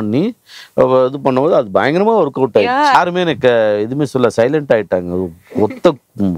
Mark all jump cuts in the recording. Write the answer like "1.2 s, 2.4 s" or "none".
2.9 s